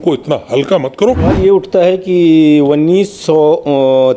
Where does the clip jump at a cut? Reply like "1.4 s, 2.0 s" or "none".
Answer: 1.3 s